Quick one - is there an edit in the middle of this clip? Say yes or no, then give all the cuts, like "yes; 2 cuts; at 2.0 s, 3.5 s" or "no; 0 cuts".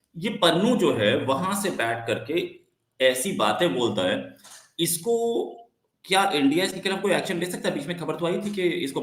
no; 0 cuts